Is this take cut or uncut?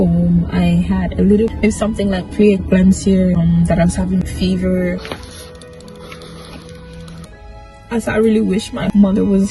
cut